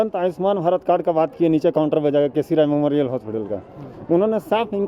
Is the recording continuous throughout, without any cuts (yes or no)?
yes